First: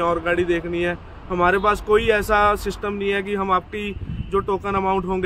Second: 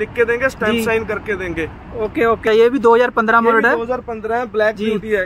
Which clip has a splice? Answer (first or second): second